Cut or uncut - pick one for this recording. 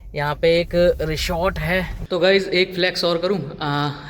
cut